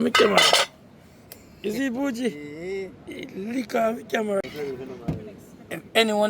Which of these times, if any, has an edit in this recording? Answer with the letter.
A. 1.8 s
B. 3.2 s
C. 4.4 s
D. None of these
C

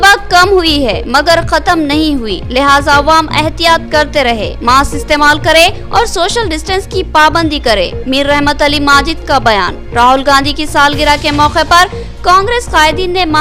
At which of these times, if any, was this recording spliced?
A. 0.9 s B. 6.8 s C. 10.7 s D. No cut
D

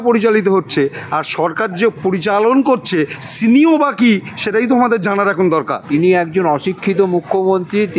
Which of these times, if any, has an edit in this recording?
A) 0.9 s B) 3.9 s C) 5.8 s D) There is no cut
C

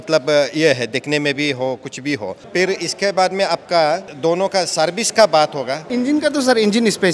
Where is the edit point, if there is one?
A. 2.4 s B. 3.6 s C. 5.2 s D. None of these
D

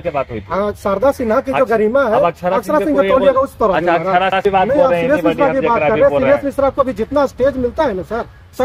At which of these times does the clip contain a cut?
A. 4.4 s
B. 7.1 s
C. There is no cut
A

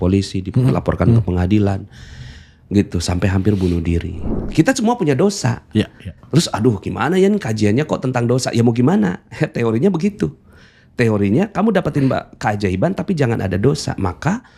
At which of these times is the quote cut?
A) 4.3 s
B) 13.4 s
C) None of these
A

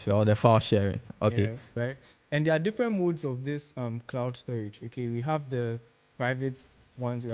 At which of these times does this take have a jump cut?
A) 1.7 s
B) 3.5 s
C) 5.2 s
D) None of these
A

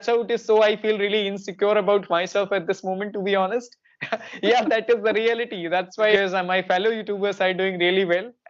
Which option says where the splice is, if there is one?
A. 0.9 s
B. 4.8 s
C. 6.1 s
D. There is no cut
C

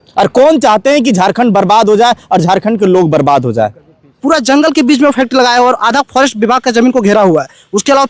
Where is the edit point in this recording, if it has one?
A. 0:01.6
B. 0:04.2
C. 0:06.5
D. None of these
B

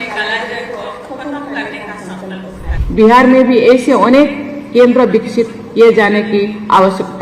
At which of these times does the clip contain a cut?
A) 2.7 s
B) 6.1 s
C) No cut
A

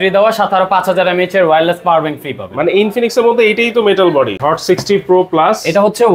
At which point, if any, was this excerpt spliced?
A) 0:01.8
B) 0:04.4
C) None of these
B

